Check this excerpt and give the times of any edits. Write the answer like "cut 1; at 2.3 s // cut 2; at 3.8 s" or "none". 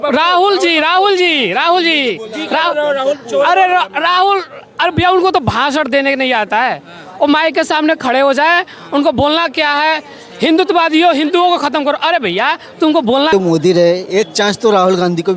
cut 1; at 13.3 s